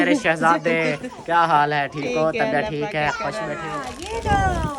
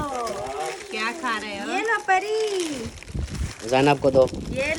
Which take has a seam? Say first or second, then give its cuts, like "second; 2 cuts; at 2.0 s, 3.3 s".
first; 1 cut; at 3.7 s